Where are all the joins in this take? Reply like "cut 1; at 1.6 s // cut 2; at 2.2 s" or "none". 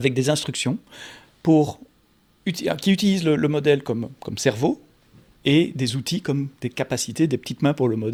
none